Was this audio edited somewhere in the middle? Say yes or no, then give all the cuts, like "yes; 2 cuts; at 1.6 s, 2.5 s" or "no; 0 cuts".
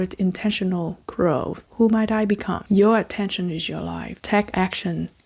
yes; 3 cuts; at 1.6 s, 2.6 s, 4.1 s